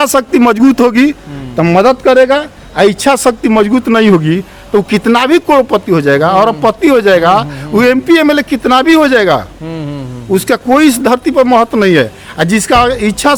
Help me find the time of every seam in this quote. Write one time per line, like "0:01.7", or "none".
none